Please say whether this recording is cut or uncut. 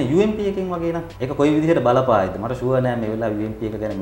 cut